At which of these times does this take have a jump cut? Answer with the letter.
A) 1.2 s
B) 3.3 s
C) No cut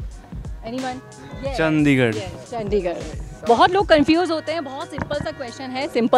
A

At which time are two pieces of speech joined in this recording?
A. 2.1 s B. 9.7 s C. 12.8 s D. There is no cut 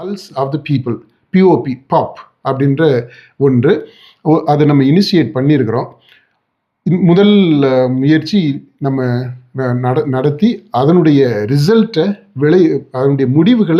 D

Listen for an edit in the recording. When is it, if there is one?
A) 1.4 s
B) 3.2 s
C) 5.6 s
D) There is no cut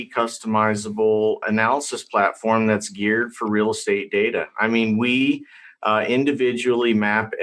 A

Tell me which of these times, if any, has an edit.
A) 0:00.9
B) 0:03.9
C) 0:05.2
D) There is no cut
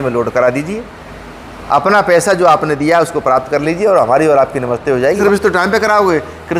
C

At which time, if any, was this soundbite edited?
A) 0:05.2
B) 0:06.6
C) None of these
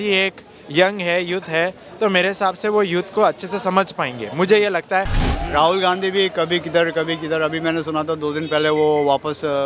A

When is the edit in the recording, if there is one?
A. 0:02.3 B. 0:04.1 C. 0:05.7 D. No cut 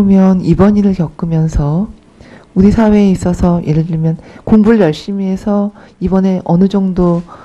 D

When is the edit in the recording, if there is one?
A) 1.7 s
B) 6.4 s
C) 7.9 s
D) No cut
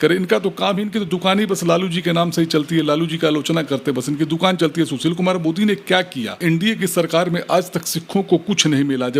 B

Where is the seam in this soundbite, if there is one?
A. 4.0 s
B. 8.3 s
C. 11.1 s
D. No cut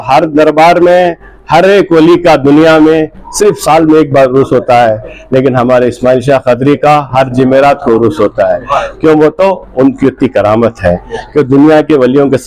D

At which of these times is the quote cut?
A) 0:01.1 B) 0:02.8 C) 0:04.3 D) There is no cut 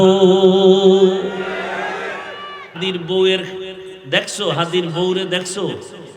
B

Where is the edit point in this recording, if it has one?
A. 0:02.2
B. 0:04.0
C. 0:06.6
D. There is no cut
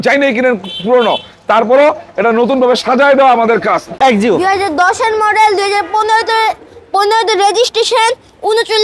B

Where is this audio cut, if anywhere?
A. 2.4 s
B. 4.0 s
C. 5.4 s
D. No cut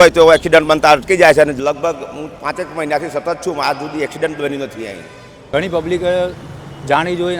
C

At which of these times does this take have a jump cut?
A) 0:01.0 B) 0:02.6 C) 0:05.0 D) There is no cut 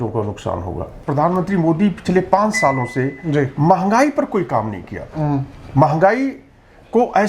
A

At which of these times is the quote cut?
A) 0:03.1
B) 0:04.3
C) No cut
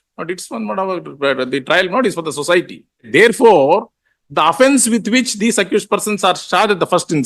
A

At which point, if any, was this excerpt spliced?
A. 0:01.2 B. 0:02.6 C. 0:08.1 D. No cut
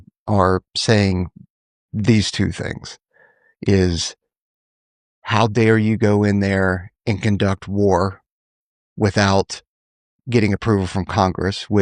D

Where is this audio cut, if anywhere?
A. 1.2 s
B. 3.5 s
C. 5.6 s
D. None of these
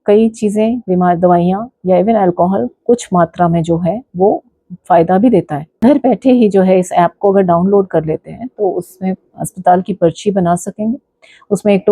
C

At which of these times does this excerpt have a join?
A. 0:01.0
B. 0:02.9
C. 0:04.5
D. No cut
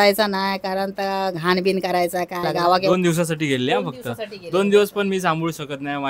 B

